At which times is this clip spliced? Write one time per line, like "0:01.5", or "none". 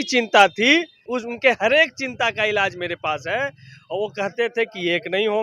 0:01.1